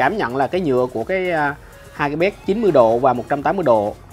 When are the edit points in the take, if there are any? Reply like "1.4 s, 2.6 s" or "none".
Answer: none